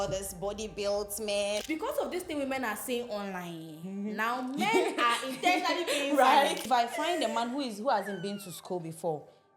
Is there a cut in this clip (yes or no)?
yes